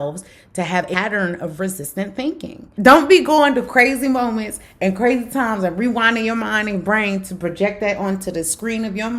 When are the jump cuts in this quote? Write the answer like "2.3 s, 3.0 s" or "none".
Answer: 0.9 s, 2.6 s